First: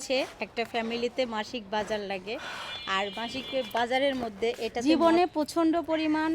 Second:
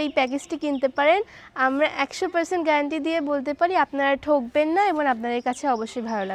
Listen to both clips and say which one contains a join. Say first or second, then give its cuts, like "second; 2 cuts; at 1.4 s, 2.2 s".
first; 1 cut; at 4.8 s